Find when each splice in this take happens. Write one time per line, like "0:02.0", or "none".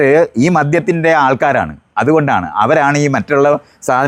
none